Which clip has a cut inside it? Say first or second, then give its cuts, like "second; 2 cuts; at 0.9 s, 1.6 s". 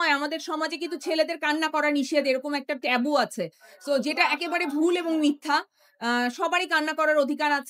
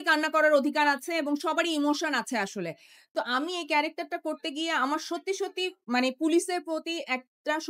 second; 1 cut; at 3.1 s